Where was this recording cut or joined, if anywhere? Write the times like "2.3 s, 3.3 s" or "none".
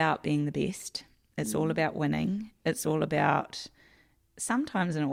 none